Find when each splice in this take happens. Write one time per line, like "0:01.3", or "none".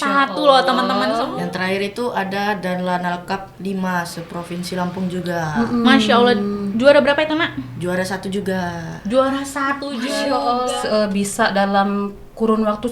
0:01.3
0:10.7